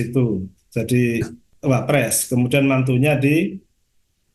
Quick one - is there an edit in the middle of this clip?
yes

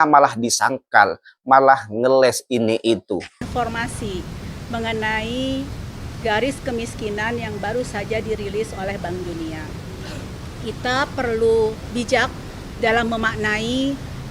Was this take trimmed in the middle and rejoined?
yes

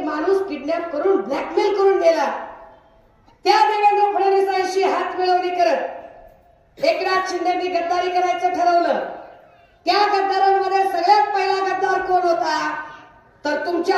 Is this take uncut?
yes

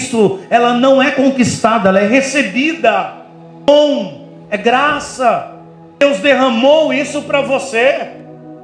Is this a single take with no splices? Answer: no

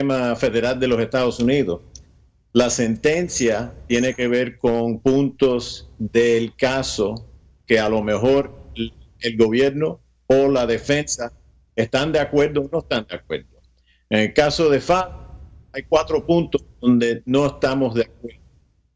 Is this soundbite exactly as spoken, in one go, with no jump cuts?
no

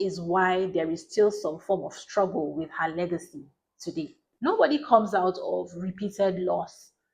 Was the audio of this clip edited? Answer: yes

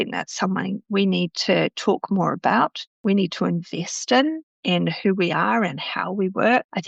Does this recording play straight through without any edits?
yes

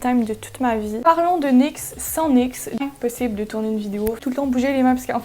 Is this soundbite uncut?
no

